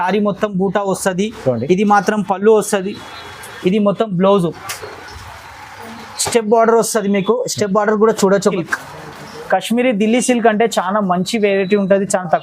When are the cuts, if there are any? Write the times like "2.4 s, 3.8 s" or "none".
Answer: 8.5 s